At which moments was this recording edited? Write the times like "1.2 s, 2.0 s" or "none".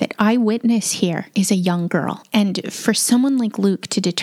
1.2 s